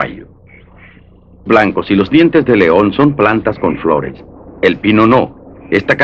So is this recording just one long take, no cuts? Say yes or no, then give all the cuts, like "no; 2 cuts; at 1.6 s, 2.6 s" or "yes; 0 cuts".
yes; 0 cuts